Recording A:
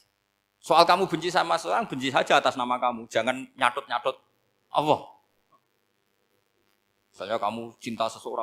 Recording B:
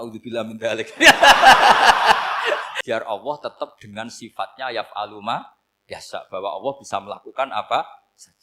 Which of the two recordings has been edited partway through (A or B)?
B